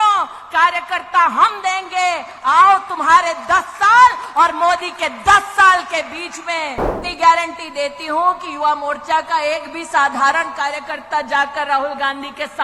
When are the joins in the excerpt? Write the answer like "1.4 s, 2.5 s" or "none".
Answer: 7.0 s